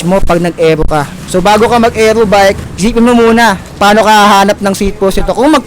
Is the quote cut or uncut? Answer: cut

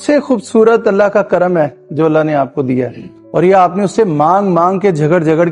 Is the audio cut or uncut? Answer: uncut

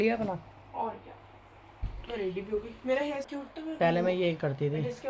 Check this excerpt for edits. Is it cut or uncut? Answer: cut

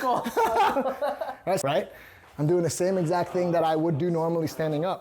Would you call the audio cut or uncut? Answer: cut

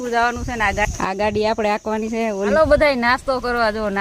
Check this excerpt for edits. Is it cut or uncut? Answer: cut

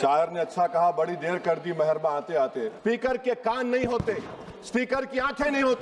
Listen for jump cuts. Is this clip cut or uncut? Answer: cut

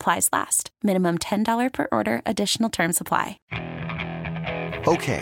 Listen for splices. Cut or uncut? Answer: cut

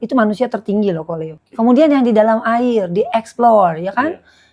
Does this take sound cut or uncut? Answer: cut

